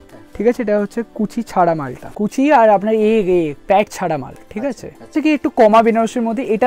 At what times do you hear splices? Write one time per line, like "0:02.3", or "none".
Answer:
0:02.0
0:05.1